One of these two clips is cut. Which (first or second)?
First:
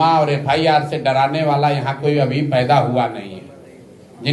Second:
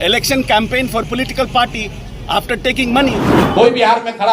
second